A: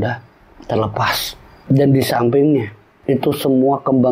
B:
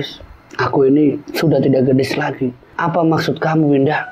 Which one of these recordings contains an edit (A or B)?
B